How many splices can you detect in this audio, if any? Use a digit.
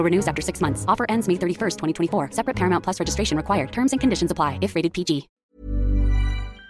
1